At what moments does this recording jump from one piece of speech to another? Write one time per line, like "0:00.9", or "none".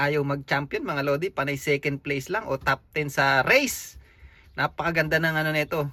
none